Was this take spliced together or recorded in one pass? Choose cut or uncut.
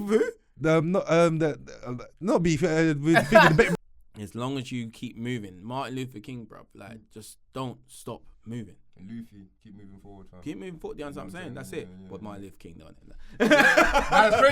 cut